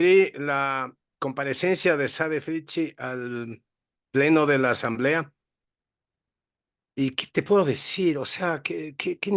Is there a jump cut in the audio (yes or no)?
no